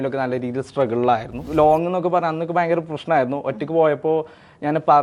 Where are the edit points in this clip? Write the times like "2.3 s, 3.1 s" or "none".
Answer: 1.4 s